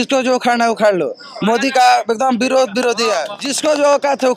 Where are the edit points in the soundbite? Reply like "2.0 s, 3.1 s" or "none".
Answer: 3.4 s

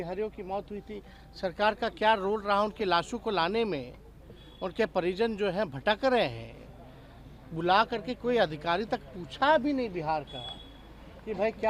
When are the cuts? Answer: none

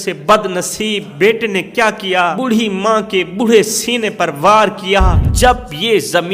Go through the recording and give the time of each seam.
1.1 s, 2.4 s, 5.2 s

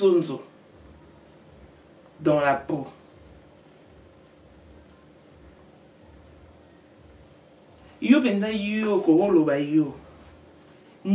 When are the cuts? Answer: none

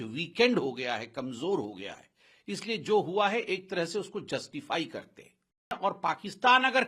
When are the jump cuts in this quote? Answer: 5.8 s

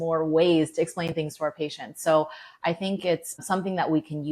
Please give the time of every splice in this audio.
3.4 s

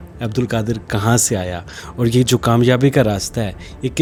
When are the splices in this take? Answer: none

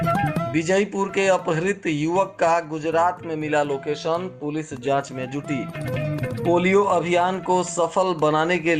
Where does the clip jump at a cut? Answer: none

